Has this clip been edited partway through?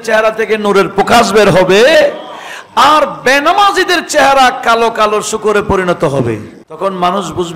yes; 1 cut; at 6.6 s

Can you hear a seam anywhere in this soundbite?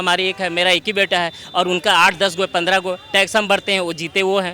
no; 0 cuts

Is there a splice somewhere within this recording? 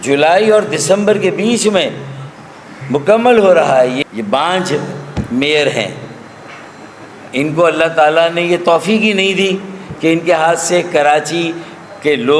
yes; 1 cut; at 4.0 s

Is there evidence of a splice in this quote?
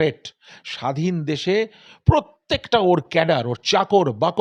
no; 0 cuts

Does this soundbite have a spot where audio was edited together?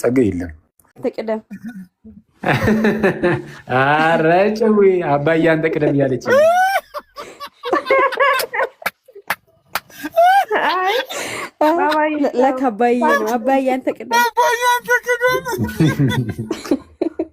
yes; 1 cut; at 1.0 s

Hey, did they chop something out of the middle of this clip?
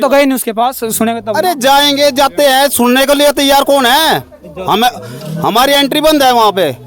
no; 0 cuts

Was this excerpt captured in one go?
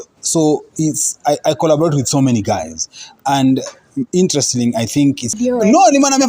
no; 1 cut; at 5.4 s

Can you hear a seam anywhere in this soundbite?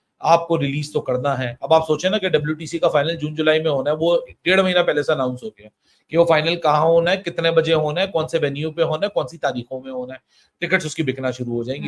no; 0 cuts

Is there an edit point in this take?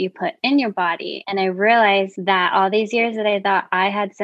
yes; 2 cuts; at 1.1 s, 2.1 s

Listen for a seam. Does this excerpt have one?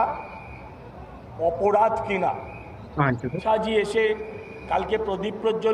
yes; 1 cut; at 3.4 s

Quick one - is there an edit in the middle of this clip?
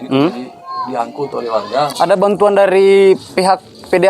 yes; 1 cut; at 1.9 s

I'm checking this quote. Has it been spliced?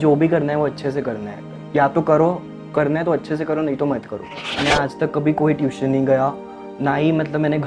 yes; 1 cut; at 4.5 s

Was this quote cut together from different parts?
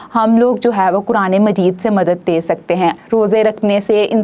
yes; 1 cut; at 3.0 s

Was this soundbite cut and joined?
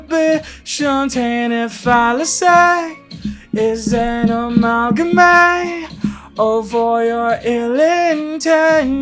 no; 0 cuts

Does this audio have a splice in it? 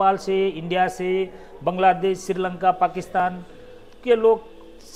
no; 0 cuts

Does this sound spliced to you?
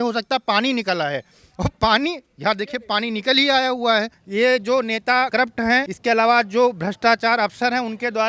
yes; 2 cuts; at 4.2 s, 5.5 s

